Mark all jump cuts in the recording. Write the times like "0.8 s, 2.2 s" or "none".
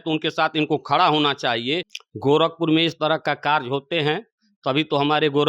1.9 s